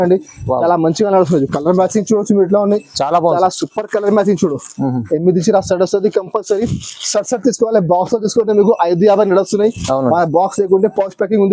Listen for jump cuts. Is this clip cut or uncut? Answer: uncut